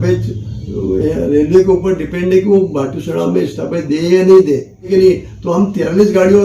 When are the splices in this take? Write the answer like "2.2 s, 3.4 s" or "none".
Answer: 4.9 s